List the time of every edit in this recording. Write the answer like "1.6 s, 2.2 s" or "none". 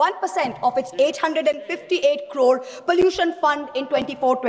none